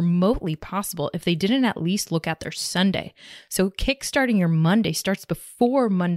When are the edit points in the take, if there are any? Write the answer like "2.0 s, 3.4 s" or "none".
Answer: none